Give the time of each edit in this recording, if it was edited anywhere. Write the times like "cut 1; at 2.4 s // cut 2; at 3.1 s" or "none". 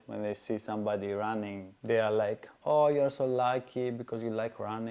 cut 1; at 1.7 s